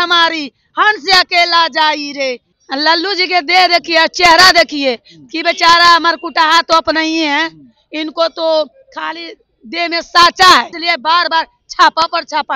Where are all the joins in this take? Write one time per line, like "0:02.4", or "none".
0:02.5
0:10.8